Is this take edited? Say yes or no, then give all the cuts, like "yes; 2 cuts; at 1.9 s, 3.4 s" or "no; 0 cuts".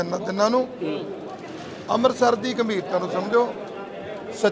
no; 0 cuts